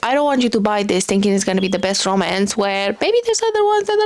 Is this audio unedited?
yes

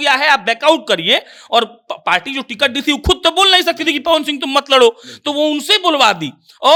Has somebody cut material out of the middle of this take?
no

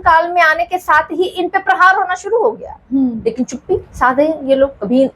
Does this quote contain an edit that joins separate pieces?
no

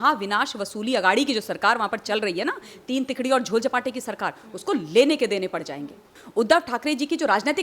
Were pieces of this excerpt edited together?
yes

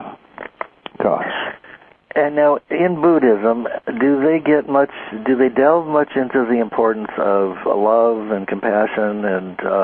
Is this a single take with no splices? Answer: no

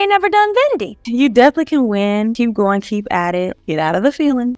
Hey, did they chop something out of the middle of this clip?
yes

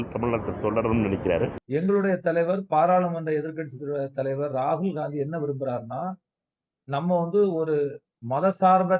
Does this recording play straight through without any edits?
no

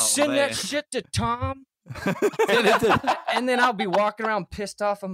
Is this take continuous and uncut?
yes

